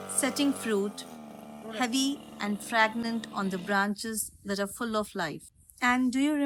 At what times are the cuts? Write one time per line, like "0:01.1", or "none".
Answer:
none

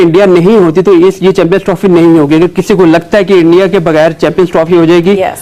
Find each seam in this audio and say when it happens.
none

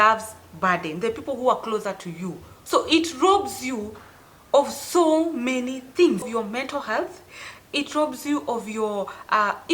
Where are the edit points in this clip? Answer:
0:02.4
0:06.3

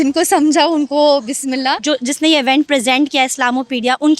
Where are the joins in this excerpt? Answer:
0:01.8

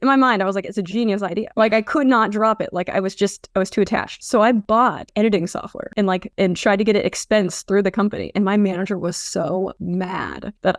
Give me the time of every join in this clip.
none

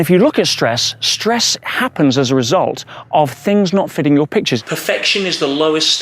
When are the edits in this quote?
0:04.6

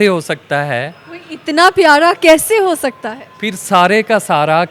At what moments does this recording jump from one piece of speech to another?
none

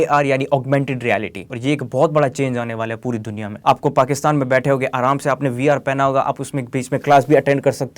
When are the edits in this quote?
0:01.5
0:03.4

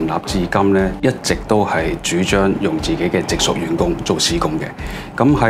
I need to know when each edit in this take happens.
0:00.9

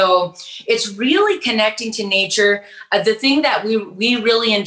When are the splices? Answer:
none

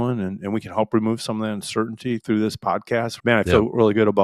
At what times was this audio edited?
0:03.1

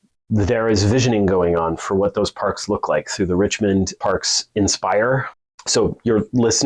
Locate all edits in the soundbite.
0:04.0
0:05.4

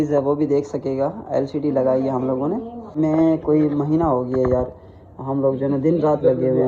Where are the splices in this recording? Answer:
0:02.9

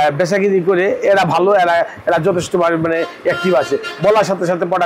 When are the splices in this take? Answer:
none

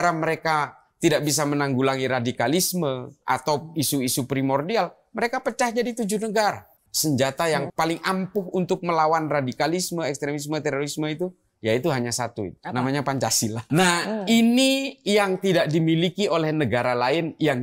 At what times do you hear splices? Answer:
0:06.8
0:07.7

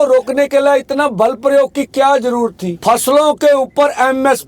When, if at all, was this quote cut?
0:02.7

